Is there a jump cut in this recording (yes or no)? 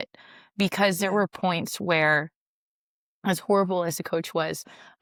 no